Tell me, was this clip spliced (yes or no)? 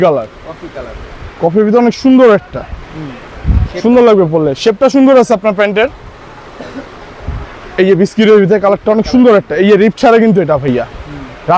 no